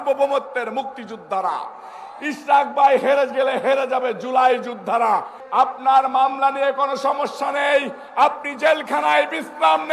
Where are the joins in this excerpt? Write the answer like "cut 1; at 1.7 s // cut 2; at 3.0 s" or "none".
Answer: cut 1; at 5.4 s